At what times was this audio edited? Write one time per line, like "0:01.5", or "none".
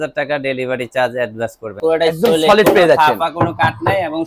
0:01.7